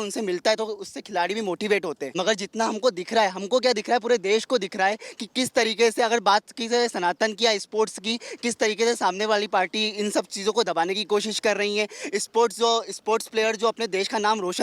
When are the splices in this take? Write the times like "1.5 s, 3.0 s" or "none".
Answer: 2.0 s